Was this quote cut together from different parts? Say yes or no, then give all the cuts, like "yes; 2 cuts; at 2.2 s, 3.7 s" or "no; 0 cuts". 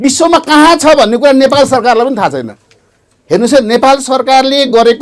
no; 0 cuts